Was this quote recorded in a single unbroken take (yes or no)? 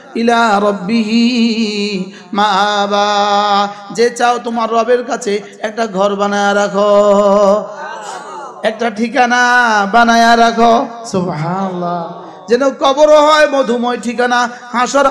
yes